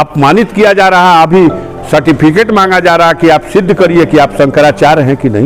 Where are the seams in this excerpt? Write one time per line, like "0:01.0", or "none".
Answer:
none